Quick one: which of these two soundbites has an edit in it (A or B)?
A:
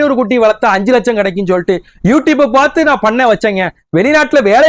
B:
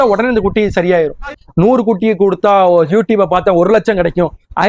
B